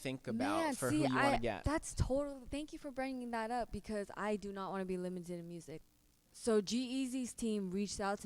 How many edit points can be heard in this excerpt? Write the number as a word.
one